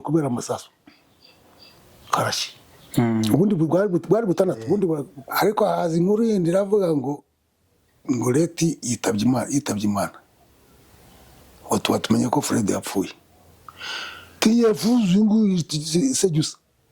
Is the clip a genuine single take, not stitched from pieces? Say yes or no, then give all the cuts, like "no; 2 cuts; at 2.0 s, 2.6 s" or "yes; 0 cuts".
no; 1 cut; at 5.1 s